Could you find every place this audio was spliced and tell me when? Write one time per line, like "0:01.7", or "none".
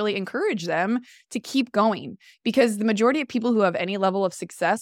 none